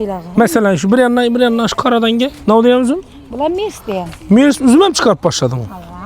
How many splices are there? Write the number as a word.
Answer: two